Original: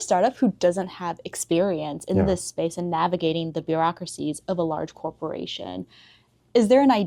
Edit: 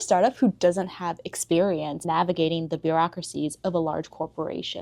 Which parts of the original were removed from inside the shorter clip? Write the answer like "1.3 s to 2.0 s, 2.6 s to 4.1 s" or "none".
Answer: 2.0 s to 2.9 s